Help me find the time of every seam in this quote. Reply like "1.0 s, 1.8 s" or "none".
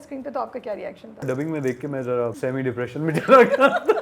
1.2 s, 2.4 s